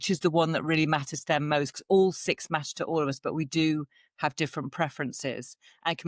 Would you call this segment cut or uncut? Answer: uncut